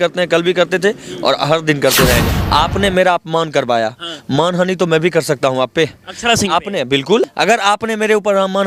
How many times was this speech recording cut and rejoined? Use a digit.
2